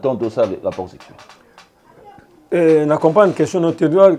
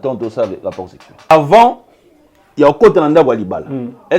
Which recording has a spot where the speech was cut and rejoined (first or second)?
second